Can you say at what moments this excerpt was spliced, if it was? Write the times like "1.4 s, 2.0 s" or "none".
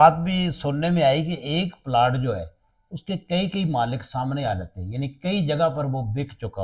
none